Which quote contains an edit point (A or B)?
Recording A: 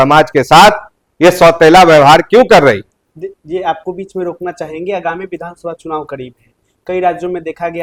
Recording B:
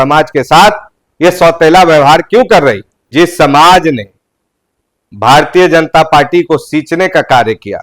B